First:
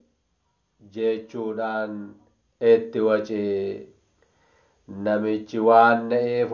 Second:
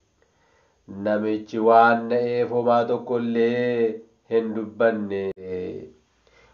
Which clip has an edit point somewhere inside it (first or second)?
second